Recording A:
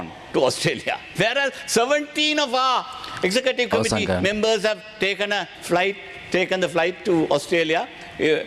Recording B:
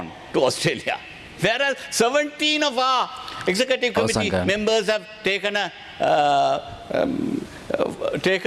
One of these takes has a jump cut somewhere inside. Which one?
A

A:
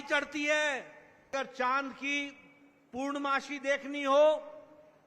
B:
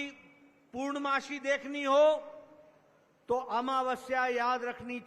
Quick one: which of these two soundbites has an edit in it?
A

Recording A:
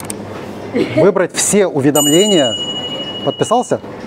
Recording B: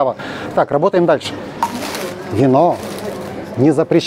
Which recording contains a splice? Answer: B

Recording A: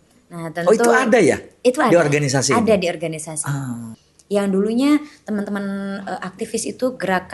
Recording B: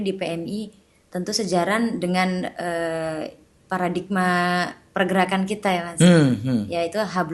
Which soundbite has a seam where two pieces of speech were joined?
A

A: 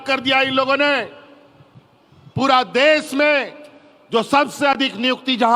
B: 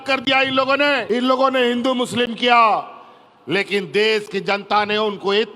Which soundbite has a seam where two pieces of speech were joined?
B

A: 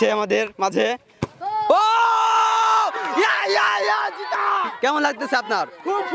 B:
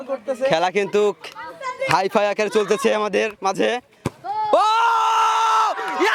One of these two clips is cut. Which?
A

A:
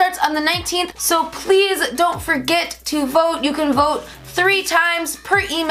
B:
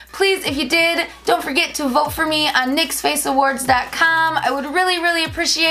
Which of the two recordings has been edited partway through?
A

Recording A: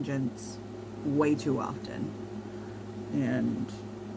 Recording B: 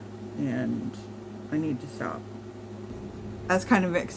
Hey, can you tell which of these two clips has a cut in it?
B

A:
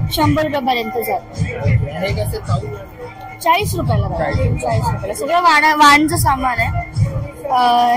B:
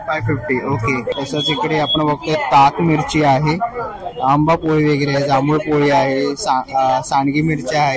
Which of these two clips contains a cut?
B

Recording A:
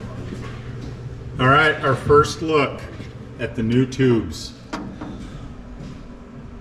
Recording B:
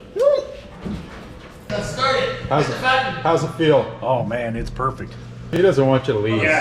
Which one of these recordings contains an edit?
B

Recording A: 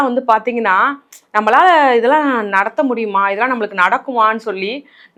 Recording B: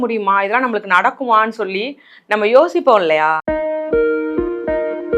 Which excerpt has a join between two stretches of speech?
B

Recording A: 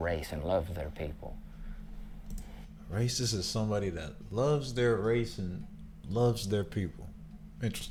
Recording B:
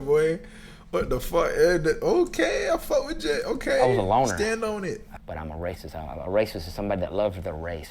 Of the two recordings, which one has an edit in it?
B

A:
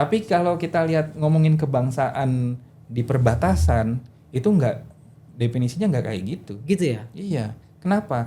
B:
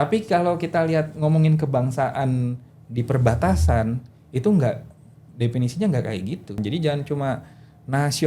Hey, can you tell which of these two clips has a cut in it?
B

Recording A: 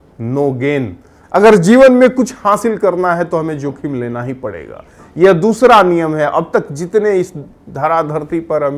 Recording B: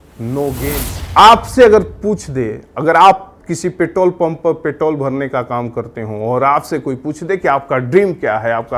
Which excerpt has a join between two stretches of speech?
B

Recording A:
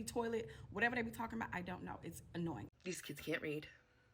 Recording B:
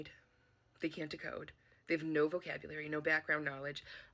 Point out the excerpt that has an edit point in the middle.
A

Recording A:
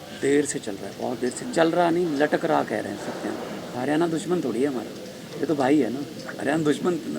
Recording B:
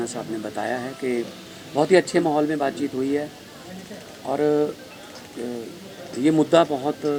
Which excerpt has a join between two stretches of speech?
A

